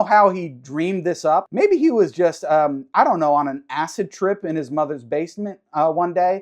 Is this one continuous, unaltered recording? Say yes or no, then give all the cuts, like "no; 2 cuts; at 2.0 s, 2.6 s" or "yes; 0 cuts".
no; 1 cut; at 1.5 s